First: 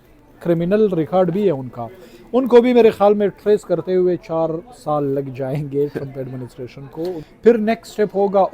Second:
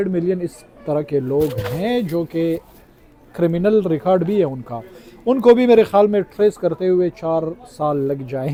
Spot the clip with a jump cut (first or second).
first